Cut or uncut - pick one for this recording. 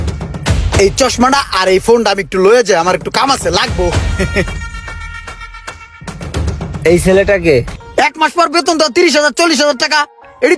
cut